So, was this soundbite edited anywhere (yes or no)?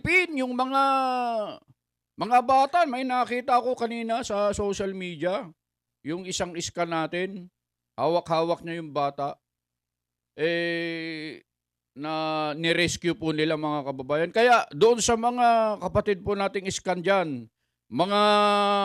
no